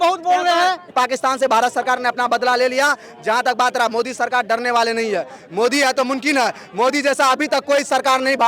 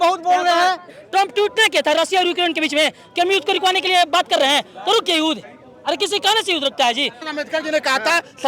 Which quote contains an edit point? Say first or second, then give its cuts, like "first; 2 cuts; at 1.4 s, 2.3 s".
second; 2 cuts; at 0.9 s, 7.3 s